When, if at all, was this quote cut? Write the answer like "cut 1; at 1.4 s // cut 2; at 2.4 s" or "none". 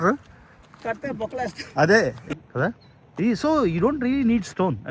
cut 1; at 2.2 s